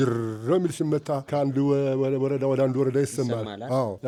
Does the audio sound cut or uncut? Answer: uncut